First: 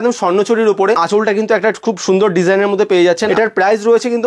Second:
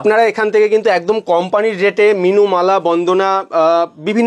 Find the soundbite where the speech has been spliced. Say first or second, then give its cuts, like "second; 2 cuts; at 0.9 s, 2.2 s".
first; 2 cuts; at 1.0 s, 3.2 s